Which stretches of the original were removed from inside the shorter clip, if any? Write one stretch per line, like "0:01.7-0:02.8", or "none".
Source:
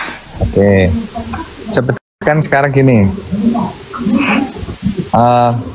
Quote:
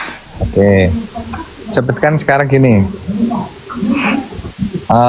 0:02.0-0:02.2